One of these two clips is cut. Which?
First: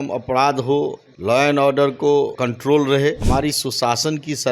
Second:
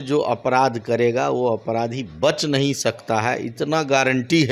first; 3 cuts; at 1.1 s, 2.4 s, 3.2 s

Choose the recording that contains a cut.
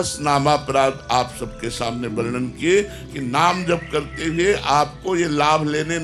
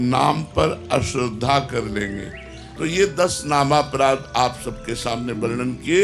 second; 1 cut; at 2.3 s

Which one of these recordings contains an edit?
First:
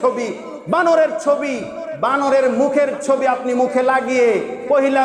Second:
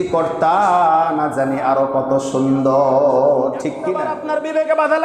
second; 1 cut; at 4.1 s

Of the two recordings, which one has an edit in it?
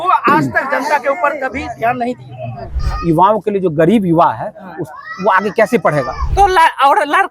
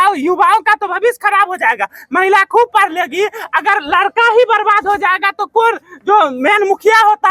first; 2 cuts; at 2.9 s, 6.2 s

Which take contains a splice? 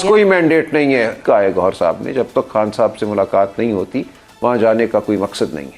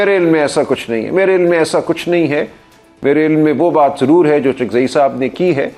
first; 1 cut; at 1.2 s

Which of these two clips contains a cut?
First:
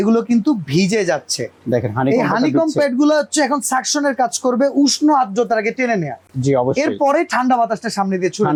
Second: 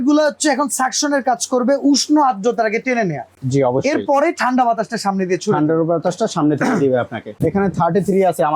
second; 1 cut; at 7.3 s

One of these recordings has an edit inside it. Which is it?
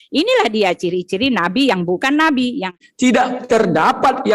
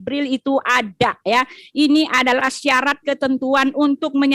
first; 1 cut; at 2.8 s

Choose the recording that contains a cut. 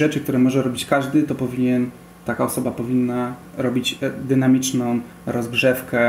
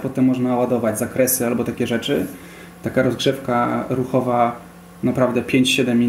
first; 1 cut; at 3.5 s

